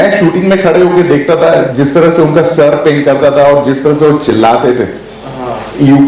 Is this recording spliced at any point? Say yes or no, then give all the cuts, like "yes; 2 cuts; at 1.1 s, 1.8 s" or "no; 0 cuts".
no; 0 cuts